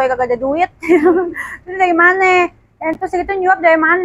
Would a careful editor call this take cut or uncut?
uncut